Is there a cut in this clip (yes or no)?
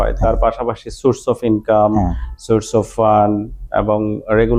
no